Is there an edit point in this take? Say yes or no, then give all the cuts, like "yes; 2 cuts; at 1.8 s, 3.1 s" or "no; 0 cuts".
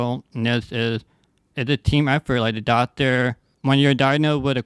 yes; 1 cut; at 3.5 s